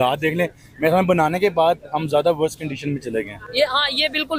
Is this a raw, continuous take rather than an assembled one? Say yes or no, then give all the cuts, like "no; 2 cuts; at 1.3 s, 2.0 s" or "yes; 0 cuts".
yes; 0 cuts